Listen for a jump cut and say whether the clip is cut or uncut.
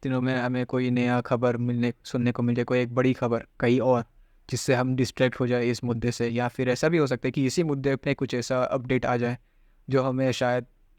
uncut